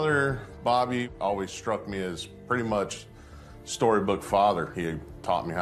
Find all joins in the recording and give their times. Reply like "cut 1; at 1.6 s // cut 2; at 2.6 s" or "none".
cut 1; at 1.0 s // cut 2; at 4.7 s